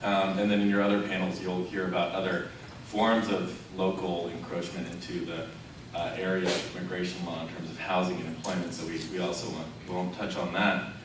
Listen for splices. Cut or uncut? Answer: cut